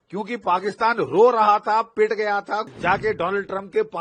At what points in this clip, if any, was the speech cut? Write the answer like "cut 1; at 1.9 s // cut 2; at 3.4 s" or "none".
cut 1; at 2.7 s